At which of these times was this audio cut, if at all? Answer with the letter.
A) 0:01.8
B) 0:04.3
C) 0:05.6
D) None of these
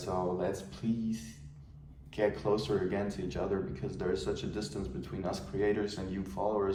D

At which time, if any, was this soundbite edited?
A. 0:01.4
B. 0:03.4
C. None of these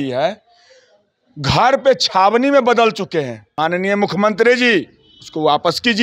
B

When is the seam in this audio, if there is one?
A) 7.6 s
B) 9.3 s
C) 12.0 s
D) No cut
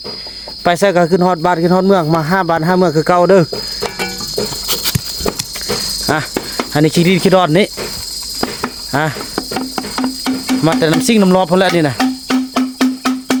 D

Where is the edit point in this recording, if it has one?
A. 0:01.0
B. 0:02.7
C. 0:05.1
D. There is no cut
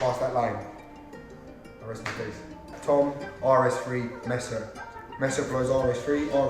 B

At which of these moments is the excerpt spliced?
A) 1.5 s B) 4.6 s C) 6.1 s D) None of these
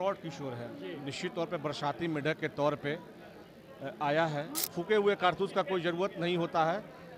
B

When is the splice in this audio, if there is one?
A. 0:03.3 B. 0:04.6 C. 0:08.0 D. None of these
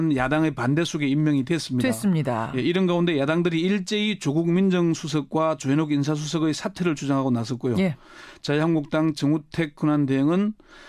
B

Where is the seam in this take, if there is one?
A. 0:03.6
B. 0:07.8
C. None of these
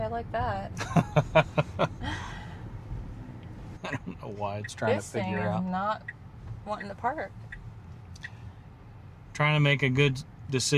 A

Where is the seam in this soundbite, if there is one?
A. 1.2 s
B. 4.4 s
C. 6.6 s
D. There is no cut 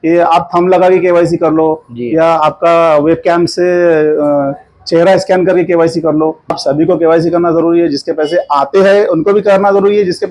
C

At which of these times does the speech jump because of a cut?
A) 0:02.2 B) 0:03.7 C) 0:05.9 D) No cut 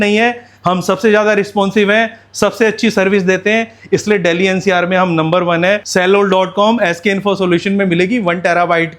C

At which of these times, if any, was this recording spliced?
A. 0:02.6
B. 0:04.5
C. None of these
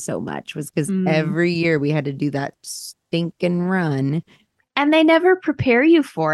C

